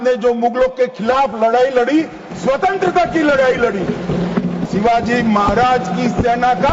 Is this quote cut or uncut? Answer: cut